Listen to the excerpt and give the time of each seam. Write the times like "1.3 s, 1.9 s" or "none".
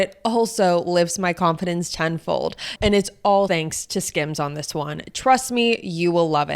2.7 s, 3.5 s